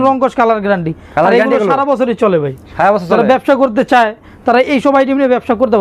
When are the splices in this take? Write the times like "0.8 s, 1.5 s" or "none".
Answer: none